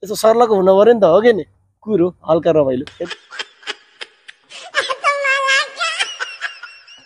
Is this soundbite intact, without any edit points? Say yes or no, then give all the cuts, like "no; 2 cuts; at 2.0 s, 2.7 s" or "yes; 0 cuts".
yes; 0 cuts